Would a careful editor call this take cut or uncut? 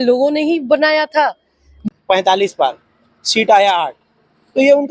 cut